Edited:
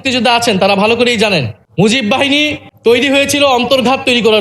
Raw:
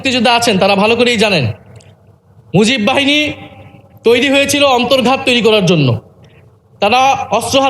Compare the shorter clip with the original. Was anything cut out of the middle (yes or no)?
yes